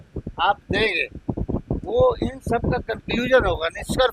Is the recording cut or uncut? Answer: uncut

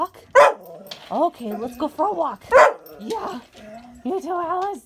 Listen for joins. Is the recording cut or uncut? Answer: uncut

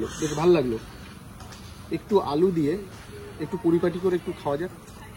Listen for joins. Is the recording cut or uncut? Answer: uncut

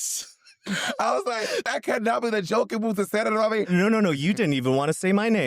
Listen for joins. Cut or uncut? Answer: cut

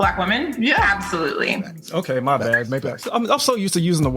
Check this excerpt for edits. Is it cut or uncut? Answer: uncut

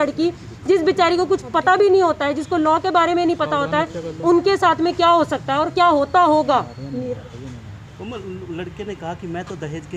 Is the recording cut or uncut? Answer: uncut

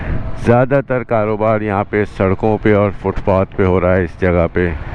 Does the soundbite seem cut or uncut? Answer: uncut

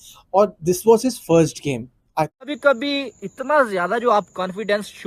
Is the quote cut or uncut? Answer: cut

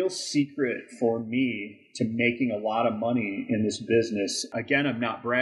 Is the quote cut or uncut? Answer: cut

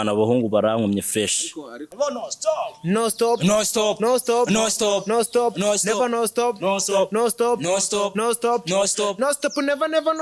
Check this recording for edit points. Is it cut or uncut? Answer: cut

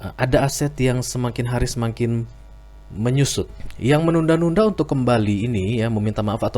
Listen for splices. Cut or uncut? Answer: cut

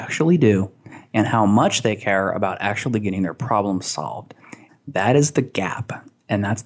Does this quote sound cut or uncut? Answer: cut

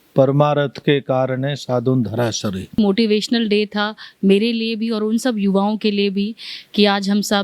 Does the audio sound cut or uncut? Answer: cut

